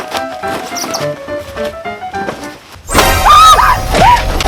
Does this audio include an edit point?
no; 0 cuts

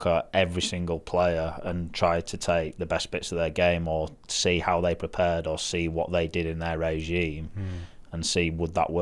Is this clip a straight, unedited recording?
yes; 0 cuts

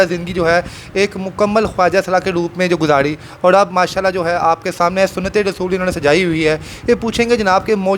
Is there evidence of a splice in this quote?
no; 0 cuts

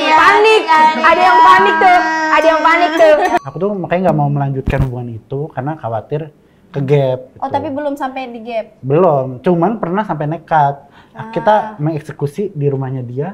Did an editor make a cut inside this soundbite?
yes; 1 cut; at 3.4 s

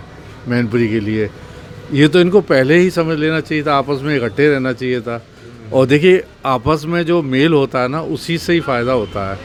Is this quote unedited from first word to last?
yes; 0 cuts

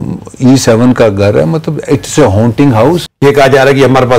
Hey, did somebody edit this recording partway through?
yes; 1 cut; at 3.0 s

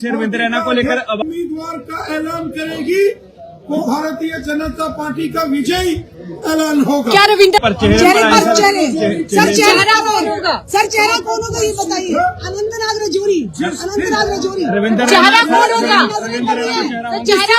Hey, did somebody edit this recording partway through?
yes; 2 cuts; at 1.2 s, 7.6 s

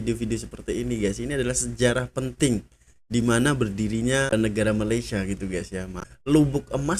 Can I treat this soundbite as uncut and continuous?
no; 2 cuts; at 4.3 s, 6.0 s

